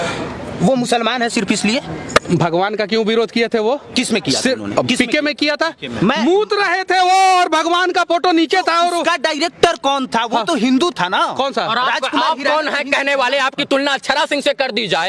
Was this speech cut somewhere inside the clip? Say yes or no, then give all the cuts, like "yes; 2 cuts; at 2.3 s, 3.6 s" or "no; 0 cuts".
no; 0 cuts